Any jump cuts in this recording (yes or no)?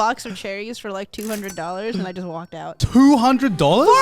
yes